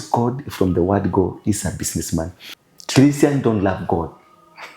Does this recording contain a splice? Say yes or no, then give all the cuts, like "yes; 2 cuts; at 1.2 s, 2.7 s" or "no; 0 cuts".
yes; 1 cut; at 2.4 s